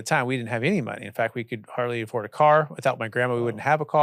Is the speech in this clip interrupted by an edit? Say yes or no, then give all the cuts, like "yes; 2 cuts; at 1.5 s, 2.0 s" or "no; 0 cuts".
no; 0 cuts